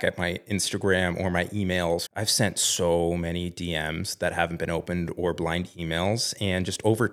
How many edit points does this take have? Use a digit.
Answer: 1